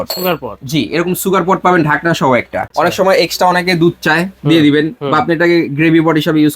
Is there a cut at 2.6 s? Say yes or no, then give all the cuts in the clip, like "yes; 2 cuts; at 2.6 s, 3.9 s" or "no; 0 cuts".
yes; 1 cut; at 2.6 s